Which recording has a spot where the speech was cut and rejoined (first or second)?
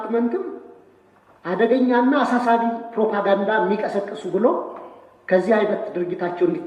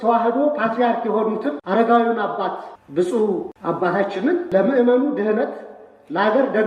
second